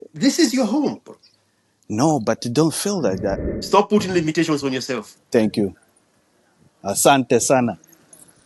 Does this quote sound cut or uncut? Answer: cut